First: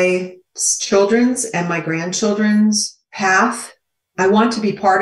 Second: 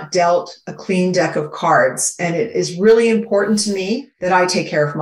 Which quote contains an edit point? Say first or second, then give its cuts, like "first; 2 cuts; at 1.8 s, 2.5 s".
second; 1 cut; at 4.1 s